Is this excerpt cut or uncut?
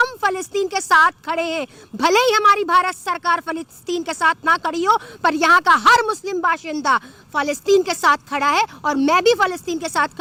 uncut